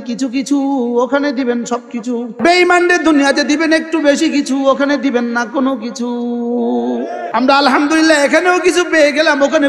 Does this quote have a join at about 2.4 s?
yes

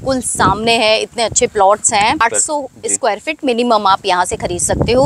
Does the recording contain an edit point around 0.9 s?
no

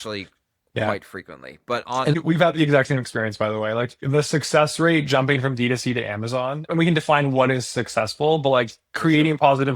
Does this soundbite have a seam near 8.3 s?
no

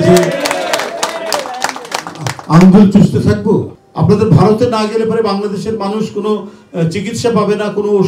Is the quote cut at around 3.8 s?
yes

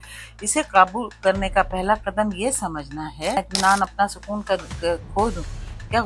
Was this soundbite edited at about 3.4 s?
yes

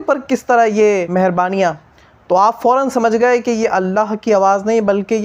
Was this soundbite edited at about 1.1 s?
yes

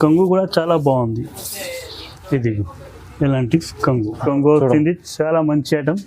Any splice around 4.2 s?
yes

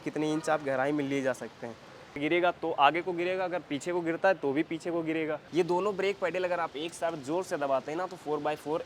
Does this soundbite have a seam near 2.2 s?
yes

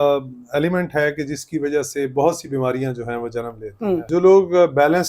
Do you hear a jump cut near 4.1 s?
yes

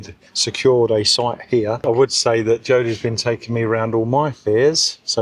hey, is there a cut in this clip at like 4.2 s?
no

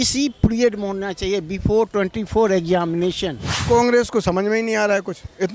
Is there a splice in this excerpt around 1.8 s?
no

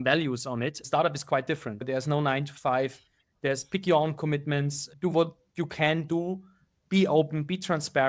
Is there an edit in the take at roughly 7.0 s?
no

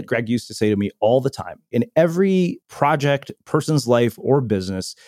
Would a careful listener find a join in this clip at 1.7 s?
yes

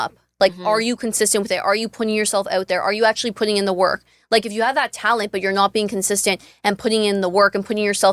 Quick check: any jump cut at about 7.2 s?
no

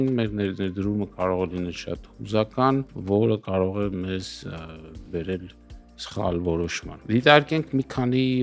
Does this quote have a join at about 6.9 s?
yes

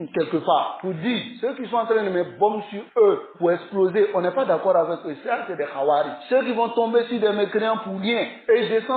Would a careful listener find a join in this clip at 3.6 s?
no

